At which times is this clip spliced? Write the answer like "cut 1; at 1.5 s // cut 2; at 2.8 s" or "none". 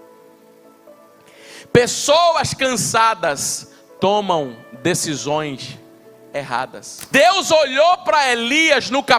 cut 1; at 6.9 s